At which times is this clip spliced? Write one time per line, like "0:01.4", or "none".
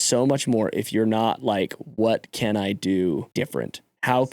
0:03.3